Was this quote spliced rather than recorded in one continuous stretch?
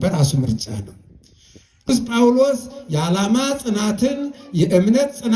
yes; 1 cut; at 1.9 s

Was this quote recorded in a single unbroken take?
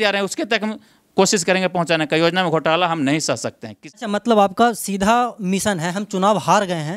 no; 1 cut; at 3.8 s

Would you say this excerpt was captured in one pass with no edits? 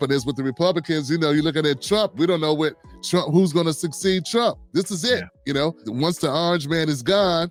yes; 0 cuts

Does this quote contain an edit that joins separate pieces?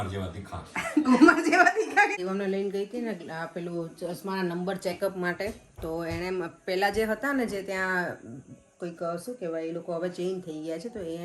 yes; 1 cut; at 2.1 s

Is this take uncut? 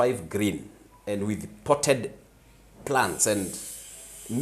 yes; 0 cuts

